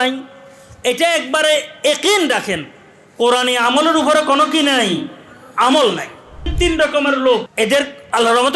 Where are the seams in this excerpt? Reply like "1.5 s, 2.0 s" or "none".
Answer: 6.5 s, 7.5 s

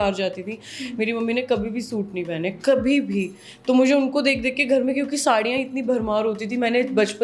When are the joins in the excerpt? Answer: none

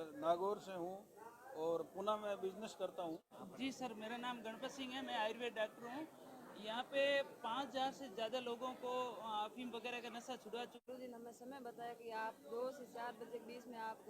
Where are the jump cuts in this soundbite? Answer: 3.6 s, 10.9 s

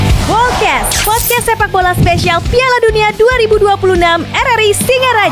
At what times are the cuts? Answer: none

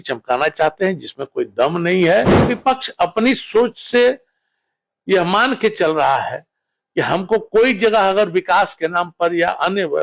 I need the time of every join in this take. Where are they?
2.4 s

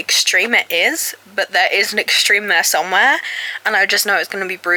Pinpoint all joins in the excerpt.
none

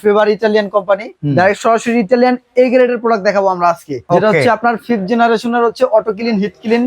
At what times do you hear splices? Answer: 1.1 s, 4.0 s

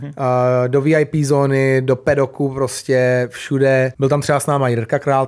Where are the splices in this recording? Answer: 3.9 s

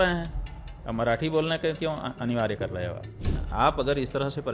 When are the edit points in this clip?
3.3 s

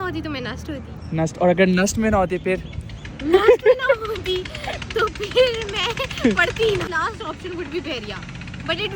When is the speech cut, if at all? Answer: 6.9 s

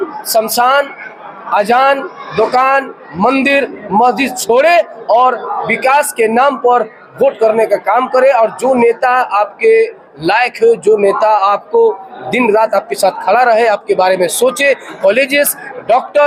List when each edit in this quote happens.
none

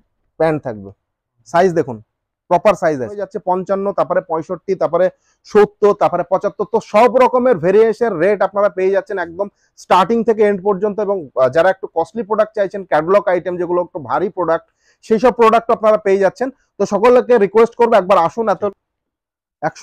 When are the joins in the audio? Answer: 3.3 s, 18.5 s

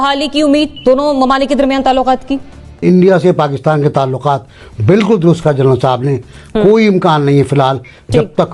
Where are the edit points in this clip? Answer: 2.8 s

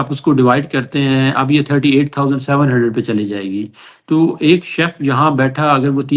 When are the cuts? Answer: none

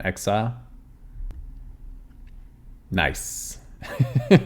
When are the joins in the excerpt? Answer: 1.3 s

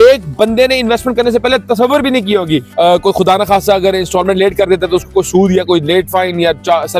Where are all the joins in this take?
2.7 s

